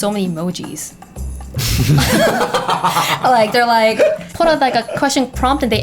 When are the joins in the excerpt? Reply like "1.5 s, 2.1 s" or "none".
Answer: 4.3 s